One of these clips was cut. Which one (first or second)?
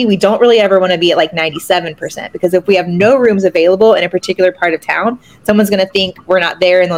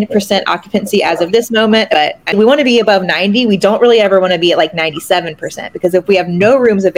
second